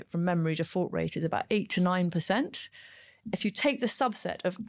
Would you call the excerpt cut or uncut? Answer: cut